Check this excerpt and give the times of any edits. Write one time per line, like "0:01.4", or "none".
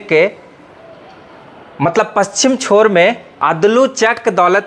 0:03.3

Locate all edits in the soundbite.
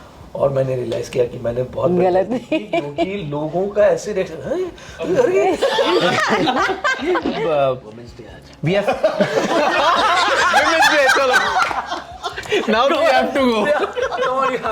0:07.4

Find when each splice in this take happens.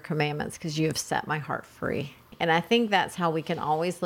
0:02.2

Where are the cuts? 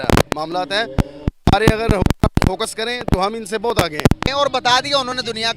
0:04.3

